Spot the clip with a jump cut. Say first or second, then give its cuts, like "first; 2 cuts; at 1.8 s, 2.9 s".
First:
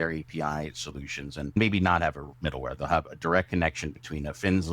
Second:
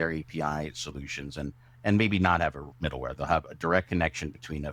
first; 1 cut; at 1.6 s